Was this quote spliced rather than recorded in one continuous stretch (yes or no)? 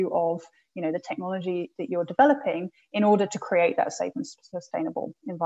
no